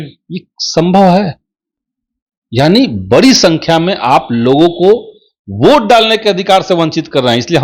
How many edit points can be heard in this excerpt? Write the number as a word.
zero